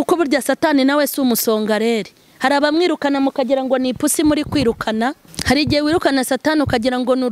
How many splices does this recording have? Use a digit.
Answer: 1